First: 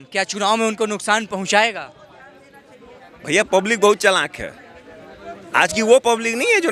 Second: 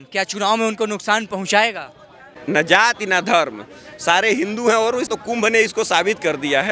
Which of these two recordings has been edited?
second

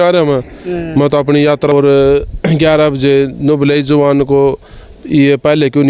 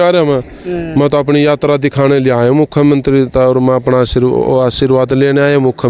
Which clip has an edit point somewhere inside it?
first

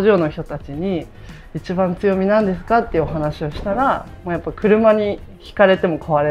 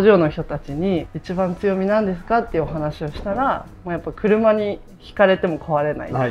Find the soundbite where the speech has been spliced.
second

